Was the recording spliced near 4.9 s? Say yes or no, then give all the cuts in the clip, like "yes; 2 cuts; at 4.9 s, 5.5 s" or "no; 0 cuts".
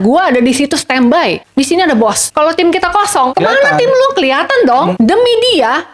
yes; 4 cuts; at 1.4 s, 2.2 s, 3.3 s, 4.9 s